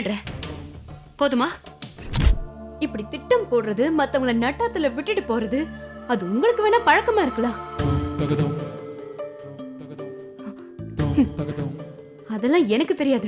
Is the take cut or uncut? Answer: cut